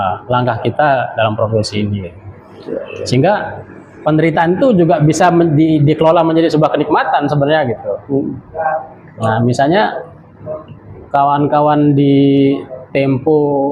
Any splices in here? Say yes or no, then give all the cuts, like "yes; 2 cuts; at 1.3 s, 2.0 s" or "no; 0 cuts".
no; 0 cuts